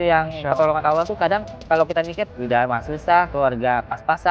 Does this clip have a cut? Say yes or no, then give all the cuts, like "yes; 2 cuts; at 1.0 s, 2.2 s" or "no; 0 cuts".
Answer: no; 0 cuts